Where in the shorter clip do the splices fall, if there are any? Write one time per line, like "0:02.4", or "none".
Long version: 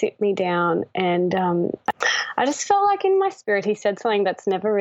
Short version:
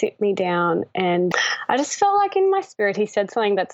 0:01.3

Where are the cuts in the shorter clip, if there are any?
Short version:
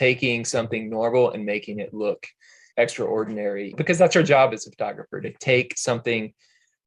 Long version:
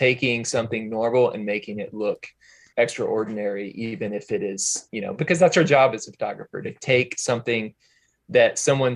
0:03.7

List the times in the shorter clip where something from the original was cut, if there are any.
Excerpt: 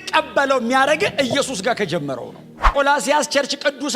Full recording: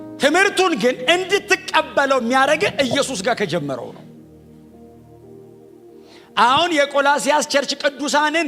0:02.7

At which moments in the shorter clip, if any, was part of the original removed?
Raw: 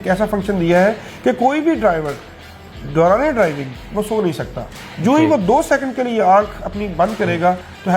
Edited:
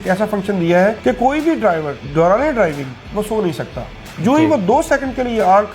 0:01.0
0:02.0

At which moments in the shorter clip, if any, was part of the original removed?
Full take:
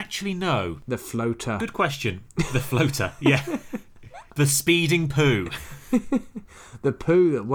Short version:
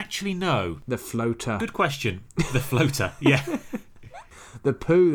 0:04.2

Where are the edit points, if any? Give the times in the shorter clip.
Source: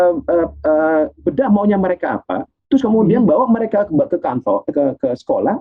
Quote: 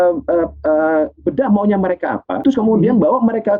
0:02.3

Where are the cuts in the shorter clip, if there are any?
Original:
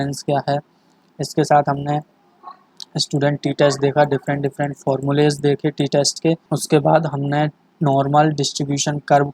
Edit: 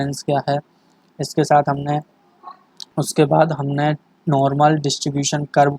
0:02.9

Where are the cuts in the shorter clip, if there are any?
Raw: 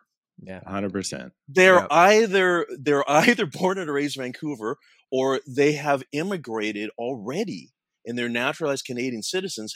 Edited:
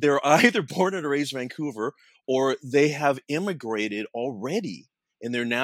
none

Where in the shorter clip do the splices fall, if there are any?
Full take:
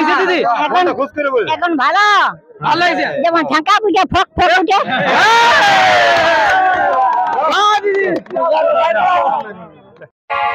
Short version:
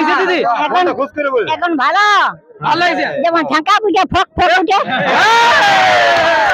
none

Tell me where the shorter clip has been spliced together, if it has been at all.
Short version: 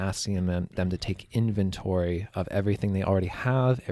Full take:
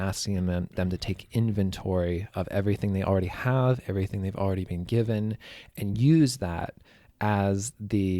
none

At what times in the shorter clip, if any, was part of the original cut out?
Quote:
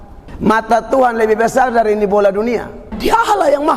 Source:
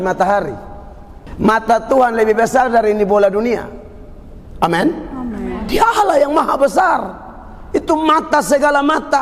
0:02.8

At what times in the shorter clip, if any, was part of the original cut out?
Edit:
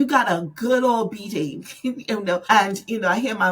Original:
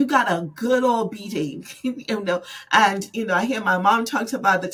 0:02.5

